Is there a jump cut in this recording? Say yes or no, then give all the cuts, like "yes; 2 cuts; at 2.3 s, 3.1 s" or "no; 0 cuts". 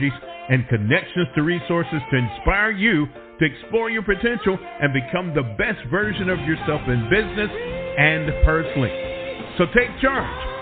no; 0 cuts